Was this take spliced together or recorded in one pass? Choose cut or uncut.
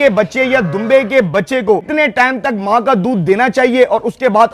cut